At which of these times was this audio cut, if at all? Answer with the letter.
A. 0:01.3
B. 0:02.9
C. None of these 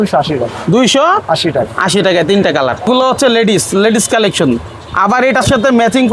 B